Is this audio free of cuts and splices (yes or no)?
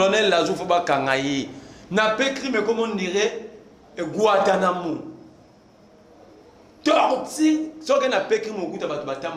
yes